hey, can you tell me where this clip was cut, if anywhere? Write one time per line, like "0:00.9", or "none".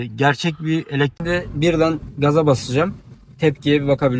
0:01.1